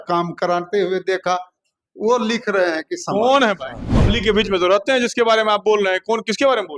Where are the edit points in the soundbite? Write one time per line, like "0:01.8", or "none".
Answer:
0:03.9